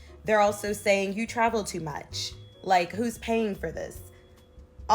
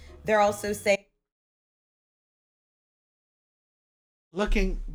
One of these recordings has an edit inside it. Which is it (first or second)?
first